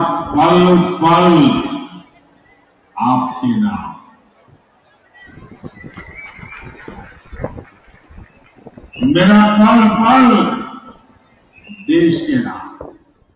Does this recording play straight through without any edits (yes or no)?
yes